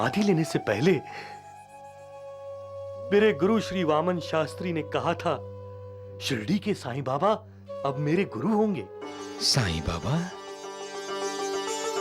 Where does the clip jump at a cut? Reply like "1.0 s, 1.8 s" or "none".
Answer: none